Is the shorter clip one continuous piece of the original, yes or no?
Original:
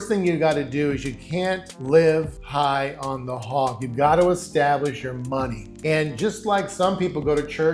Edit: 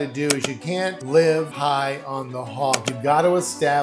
no